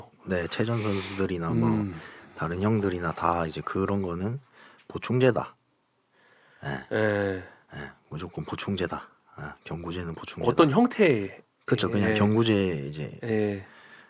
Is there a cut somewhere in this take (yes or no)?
no